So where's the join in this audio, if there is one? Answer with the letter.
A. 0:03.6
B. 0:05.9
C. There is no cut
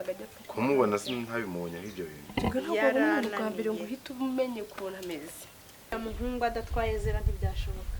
B